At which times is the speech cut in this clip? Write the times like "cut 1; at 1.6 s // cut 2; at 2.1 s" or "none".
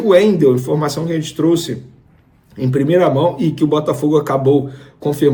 none

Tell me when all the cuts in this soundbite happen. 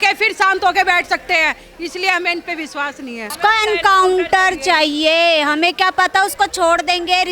cut 1; at 3.3 s

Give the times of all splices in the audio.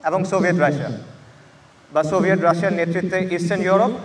none

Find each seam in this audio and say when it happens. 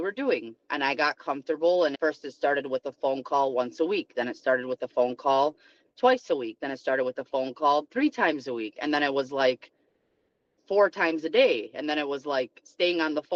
none

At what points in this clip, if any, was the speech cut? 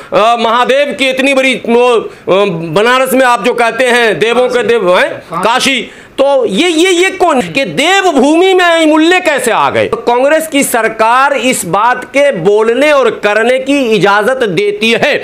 cut 1; at 7.4 s // cut 2; at 10.0 s

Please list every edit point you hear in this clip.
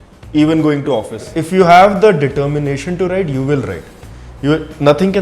cut 1; at 1.3 s

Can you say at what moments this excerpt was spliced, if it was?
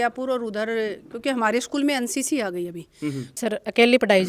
cut 1; at 3.3 s

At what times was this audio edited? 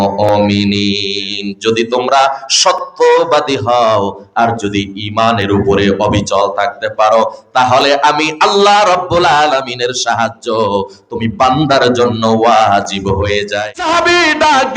cut 1; at 13.7 s

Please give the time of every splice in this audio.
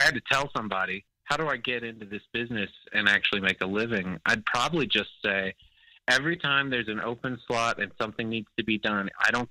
cut 1; at 1.1 s

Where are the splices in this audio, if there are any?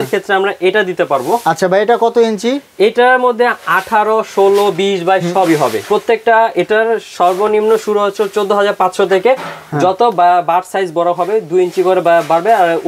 none

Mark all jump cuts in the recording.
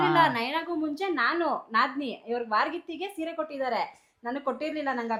none

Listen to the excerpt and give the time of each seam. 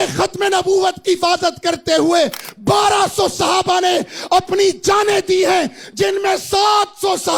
none

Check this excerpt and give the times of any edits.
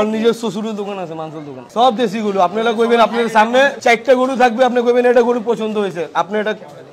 cut 1; at 1.7 s // cut 2; at 3.8 s

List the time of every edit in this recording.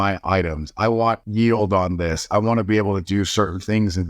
cut 1; at 1.2 s

